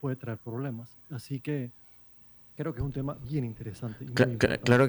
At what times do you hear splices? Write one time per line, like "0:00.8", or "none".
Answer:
none